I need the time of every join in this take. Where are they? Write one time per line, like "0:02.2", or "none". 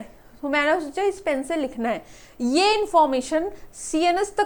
none